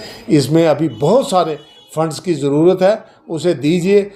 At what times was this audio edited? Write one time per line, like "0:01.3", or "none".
none